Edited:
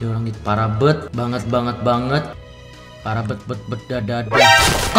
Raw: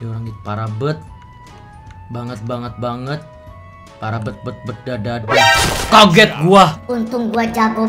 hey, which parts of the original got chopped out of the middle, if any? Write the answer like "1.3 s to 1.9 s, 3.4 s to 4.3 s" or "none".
1.1 s to 2.0 s